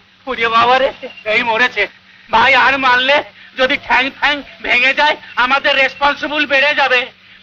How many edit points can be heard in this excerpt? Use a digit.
1